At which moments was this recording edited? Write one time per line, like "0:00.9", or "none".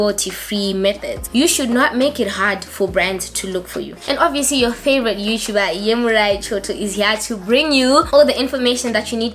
0:01.2
0:03.9